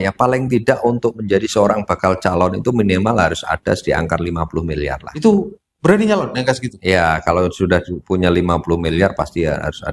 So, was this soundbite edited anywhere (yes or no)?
no